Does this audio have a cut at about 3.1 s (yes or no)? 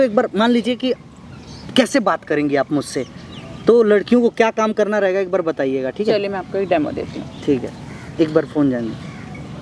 no